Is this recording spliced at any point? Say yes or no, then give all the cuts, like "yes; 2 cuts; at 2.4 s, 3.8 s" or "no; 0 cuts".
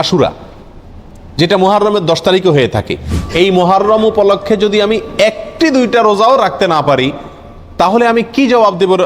yes; 1 cut; at 3.2 s